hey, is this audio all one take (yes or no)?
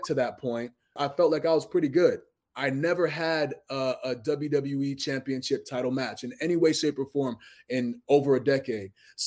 no